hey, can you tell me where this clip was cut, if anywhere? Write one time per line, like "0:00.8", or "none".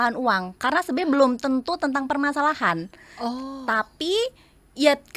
none